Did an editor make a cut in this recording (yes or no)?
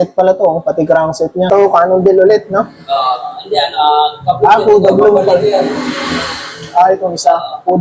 yes